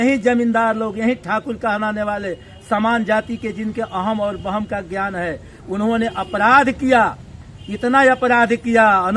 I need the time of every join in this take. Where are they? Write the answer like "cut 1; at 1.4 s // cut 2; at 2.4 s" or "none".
none